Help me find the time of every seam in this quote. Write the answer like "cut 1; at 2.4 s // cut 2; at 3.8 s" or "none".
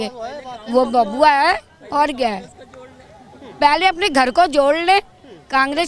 none